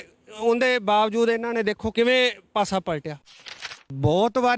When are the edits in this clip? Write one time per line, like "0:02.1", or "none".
0:01.9
0:03.7